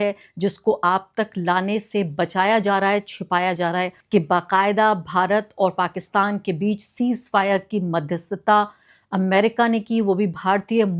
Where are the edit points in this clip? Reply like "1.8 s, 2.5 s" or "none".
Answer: 4.0 s